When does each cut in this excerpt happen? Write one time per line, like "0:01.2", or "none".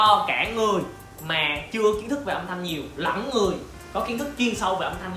none